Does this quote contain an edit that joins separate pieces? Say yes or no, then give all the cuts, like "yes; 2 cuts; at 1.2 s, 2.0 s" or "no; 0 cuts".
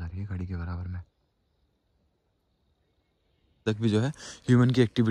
yes; 1 cut; at 3.6 s